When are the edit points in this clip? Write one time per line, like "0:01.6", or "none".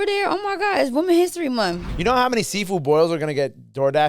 0:01.9